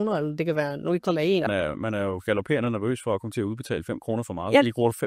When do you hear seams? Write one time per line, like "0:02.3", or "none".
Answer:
0:01.4